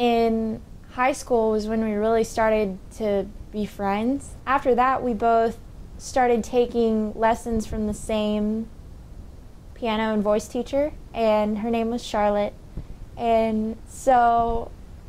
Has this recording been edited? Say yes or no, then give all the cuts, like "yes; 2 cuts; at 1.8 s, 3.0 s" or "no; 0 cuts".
yes; 1 cut; at 4.3 s